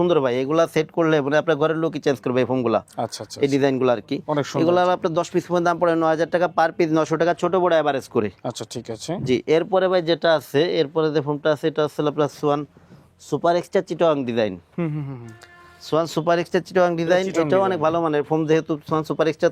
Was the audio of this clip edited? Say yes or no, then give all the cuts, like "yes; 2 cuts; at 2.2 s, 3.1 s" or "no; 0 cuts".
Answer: no; 0 cuts